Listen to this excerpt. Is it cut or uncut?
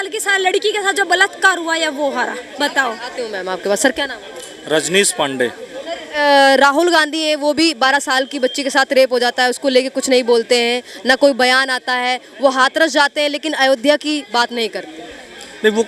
uncut